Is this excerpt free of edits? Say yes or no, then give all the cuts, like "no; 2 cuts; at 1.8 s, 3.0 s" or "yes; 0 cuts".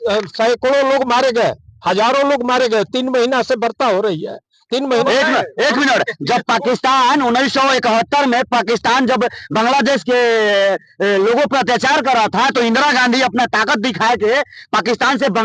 no; 1 cut; at 5.1 s